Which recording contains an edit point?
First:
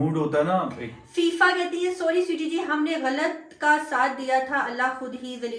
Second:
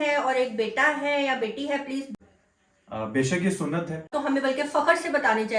second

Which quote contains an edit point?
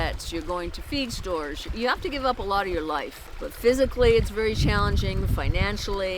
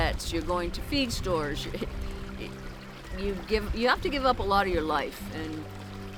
first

